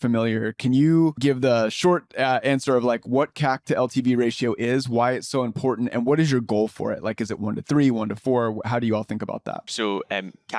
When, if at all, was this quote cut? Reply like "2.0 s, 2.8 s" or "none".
1.2 s, 9.7 s